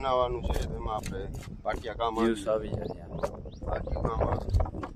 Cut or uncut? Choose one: uncut